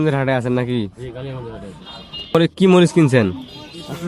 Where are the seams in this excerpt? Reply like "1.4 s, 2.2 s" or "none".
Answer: 2.3 s